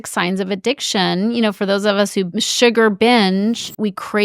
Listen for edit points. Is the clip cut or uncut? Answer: uncut